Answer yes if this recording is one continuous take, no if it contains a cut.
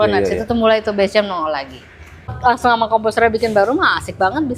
no